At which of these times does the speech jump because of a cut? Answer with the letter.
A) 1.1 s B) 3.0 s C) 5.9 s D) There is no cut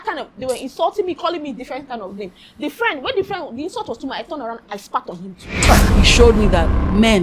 C